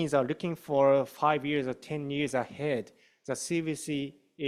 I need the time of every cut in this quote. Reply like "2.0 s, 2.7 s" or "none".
none